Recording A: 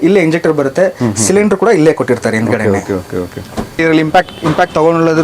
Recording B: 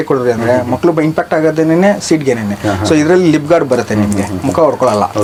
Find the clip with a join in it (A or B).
A